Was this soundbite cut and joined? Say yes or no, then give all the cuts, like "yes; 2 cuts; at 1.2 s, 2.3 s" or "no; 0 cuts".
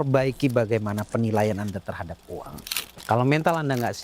yes; 1 cut; at 2.9 s